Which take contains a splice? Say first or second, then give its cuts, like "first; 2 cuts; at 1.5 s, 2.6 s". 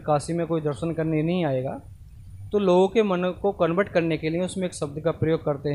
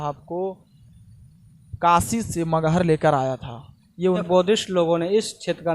second; 1 cut; at 4.2 s